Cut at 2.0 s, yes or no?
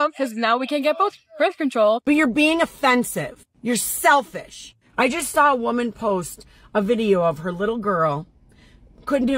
yes